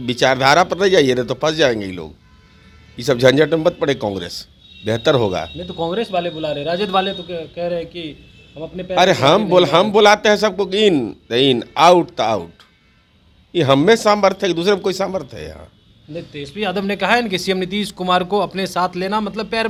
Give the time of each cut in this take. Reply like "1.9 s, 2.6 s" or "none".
none